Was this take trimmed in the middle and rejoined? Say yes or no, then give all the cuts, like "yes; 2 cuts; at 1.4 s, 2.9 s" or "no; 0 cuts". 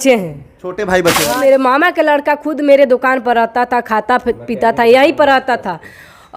yes; 1 cut; at 1.4 s